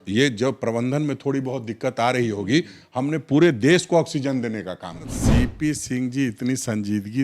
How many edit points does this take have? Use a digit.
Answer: 1